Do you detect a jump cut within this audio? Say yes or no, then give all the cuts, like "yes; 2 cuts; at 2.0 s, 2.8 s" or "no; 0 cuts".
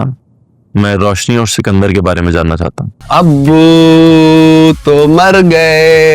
yes; 1 cut; at 2.9 s